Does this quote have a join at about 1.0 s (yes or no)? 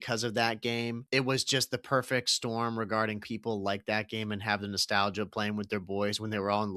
yes